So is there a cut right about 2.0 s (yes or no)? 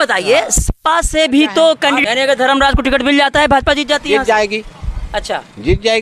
yes